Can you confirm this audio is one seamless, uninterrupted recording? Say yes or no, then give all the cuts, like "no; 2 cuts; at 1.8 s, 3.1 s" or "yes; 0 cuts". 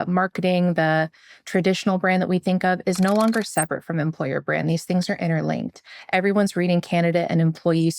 yes; 0 cuts